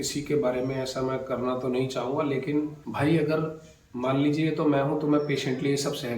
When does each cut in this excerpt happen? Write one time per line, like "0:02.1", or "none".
0:02.8